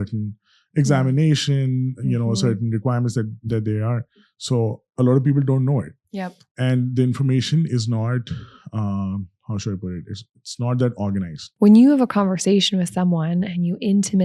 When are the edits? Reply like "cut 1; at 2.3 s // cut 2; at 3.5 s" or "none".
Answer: cut 1; at 11.4 s